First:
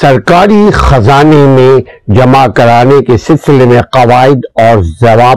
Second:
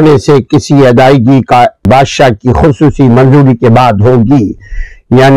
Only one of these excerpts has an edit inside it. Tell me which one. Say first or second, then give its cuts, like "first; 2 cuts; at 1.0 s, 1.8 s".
second; 1 cut; at 1.8 s